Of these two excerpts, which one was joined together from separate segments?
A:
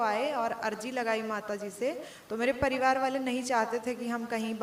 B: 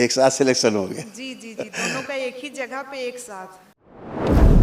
B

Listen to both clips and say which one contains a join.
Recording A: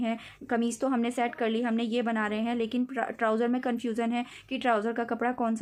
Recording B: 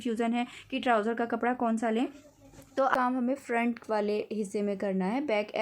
B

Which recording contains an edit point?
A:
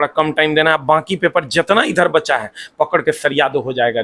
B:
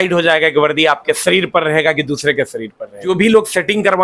B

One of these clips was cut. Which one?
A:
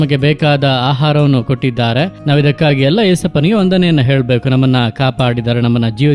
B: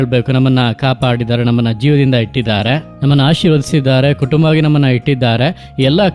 A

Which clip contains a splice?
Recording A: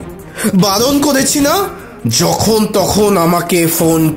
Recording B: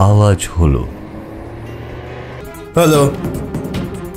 B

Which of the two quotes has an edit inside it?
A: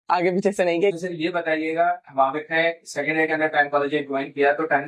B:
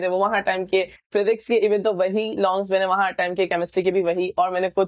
A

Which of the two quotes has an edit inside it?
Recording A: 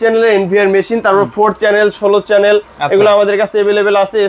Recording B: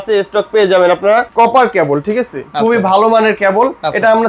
B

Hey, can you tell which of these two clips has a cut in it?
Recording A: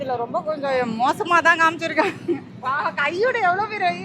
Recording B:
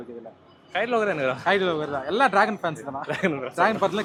A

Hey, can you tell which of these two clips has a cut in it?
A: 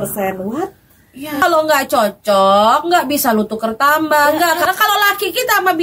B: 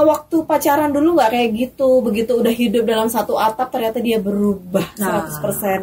A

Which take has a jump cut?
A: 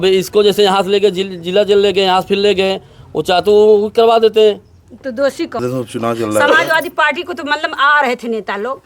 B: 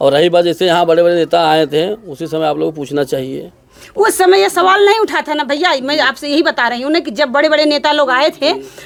A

